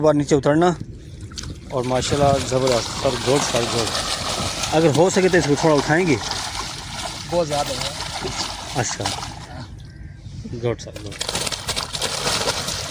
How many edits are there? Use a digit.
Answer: 0